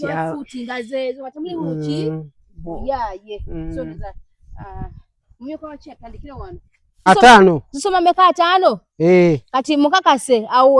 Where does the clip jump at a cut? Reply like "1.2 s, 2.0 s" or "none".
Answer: 7.1 s